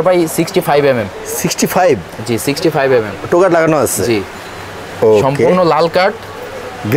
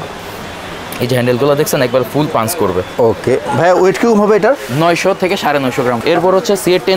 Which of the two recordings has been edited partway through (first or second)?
second